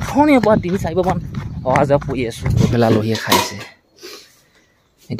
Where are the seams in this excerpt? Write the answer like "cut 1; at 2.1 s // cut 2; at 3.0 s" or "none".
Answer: cut 1; at 2.7 s

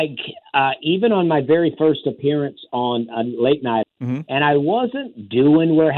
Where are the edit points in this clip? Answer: cut 1; at 3.8 s

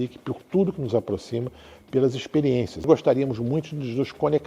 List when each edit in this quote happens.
cut 1; at 2.8 s

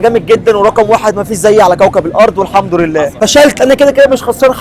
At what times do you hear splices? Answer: cut 1; at 3.1 s

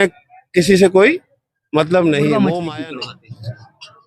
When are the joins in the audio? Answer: cut 1; at 2.5 s

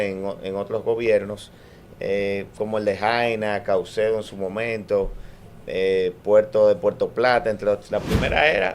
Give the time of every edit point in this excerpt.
cut 1; at 7.8 s

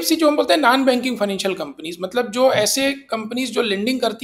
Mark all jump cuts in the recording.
none

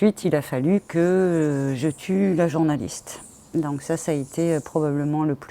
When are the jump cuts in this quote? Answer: none

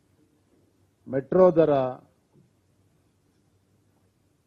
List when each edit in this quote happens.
none

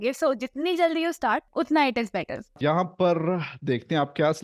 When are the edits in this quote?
cut 1; at 1.5 s // cut 2; at 2.6 s

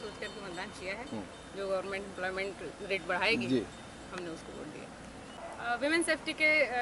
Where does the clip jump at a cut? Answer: none

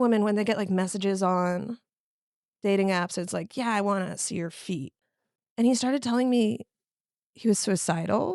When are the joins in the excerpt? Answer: cut 1; at 5.0 s

